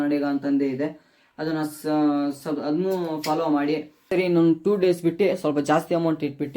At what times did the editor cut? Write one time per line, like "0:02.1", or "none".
0:04.1